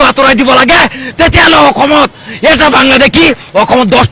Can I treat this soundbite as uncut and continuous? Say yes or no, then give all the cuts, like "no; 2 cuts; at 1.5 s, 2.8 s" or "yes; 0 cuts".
yes; 0 cuts